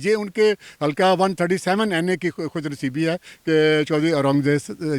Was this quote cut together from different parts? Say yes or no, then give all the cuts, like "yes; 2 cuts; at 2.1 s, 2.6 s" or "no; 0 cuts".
no; 0 cuts